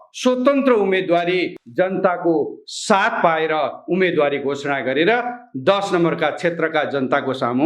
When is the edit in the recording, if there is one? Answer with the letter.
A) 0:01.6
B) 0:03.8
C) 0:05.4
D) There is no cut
A